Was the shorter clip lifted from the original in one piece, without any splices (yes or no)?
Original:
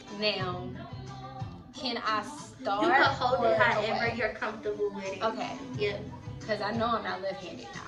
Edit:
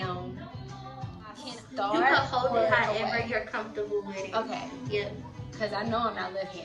no